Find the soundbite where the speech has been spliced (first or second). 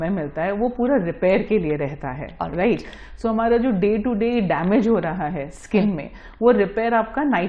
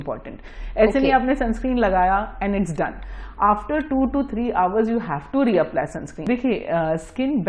second